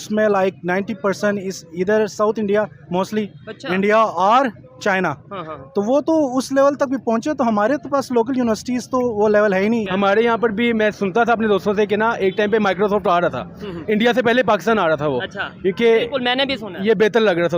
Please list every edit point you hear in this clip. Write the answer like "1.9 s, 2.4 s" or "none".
9.9 s